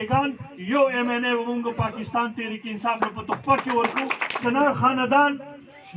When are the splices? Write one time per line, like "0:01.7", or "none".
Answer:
0:04.4